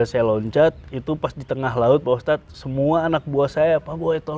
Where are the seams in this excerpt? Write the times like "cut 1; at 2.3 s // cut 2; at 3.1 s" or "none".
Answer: none